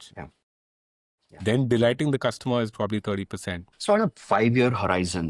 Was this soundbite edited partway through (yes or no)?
yes